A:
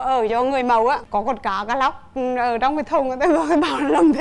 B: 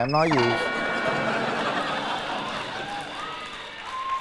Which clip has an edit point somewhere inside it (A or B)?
A